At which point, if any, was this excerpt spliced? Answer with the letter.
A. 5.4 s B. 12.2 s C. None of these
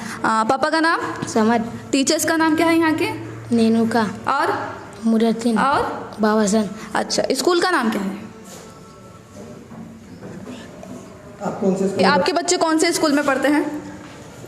B